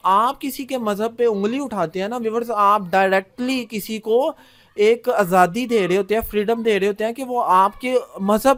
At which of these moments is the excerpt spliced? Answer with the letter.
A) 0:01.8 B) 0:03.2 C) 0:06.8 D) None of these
D